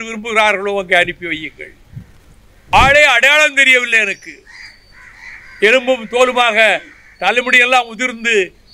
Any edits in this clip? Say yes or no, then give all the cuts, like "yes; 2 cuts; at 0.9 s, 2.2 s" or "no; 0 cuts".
yes; 1 cut; at 2.7 s